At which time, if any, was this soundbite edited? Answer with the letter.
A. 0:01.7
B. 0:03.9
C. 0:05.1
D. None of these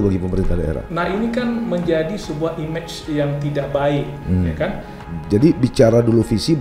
C